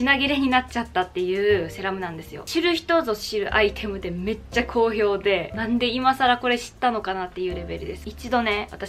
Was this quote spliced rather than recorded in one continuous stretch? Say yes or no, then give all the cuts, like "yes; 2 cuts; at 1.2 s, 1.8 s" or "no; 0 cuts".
yes; 3 cuts; at 2.5 s, 5.5 s, 8.0 s